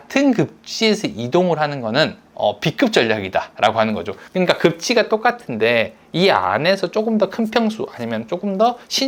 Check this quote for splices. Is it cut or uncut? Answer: uncut